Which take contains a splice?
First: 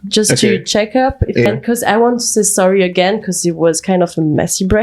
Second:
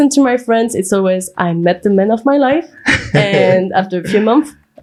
first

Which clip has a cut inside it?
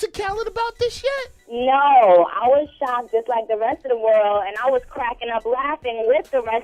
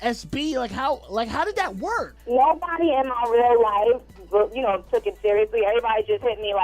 second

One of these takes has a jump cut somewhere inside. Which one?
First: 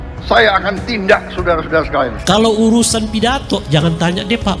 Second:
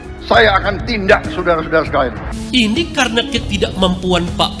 first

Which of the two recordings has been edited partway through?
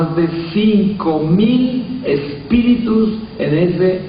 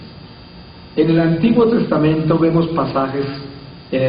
second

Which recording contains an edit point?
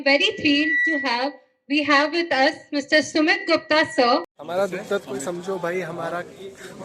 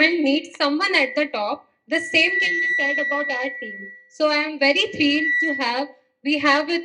first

